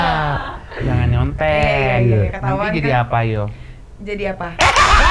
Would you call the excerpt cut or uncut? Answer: uncut